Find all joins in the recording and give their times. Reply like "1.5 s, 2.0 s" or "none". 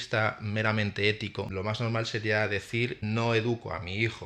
1.5 s, 3.0 s